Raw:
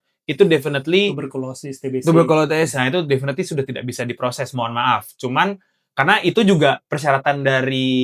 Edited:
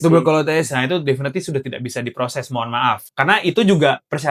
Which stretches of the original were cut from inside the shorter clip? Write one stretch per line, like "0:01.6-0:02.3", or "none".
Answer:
0:05.1-0:05.9